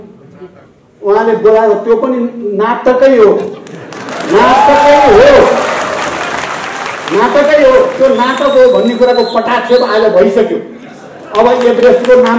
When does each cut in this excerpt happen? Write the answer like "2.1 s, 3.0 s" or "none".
none